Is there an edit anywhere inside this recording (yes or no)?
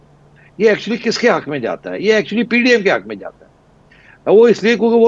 no